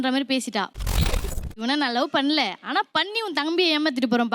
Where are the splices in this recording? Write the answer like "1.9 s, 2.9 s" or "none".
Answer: 0.9 s